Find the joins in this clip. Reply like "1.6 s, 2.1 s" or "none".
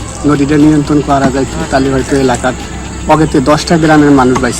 none